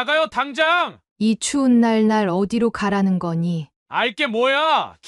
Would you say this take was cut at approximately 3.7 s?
yes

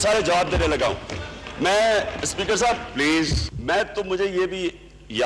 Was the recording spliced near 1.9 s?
no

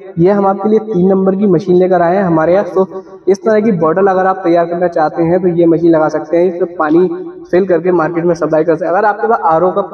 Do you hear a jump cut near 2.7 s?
yes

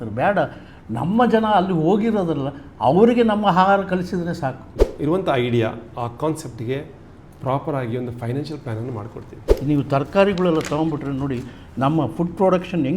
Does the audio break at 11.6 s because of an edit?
no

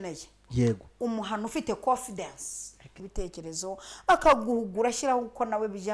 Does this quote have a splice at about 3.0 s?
yes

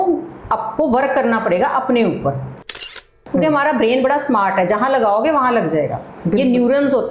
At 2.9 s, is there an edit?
yes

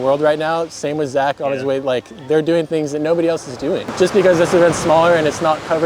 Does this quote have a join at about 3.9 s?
yes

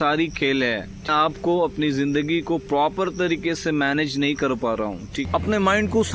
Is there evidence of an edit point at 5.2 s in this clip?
yes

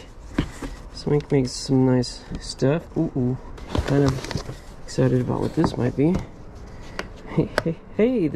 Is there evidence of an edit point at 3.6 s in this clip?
yes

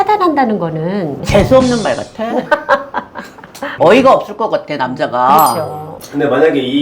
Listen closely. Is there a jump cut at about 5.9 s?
yes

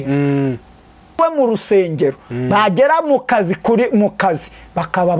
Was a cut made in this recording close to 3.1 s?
no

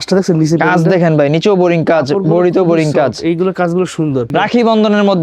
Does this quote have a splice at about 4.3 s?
yes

